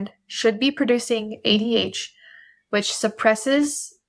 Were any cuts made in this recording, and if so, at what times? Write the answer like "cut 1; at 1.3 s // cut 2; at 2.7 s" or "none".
none